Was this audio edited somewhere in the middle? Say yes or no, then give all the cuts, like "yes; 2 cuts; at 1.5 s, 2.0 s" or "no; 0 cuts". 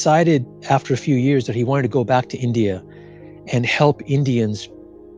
no; 0 cuts